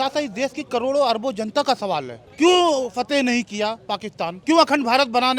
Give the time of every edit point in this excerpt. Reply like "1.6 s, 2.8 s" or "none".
2.2 s, 4.4 s